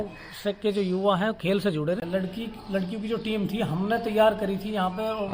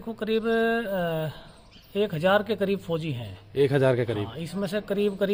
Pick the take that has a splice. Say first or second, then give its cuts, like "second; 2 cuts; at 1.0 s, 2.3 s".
first; 1 cut; at 2.0 s